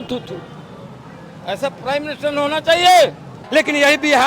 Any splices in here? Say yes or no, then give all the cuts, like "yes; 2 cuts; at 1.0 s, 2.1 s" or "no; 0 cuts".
yes; 1 cut; at 3.4 s